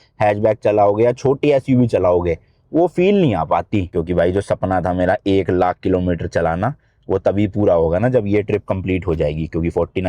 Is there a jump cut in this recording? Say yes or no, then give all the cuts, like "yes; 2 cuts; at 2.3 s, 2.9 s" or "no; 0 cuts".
yes; 1 cut; at 3.9 s